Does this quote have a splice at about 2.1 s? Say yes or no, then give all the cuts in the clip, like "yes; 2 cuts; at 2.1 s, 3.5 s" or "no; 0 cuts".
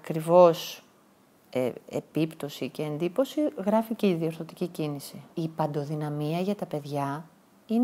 no; 1 cut; at 5.2 s